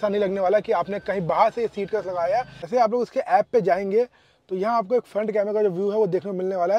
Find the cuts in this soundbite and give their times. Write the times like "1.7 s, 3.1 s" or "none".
2.7 s